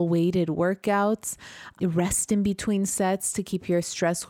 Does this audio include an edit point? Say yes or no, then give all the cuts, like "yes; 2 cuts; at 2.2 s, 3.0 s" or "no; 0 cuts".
no; 0 cuts